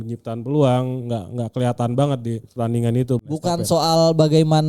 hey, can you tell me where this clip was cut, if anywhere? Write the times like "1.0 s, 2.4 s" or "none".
2.5 s, 3.3 s